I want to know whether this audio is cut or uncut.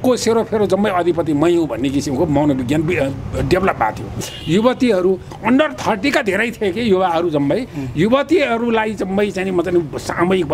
cut